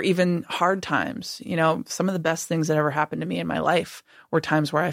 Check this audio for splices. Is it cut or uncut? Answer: uncut